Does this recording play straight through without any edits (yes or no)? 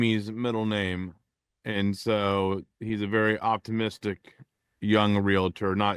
yes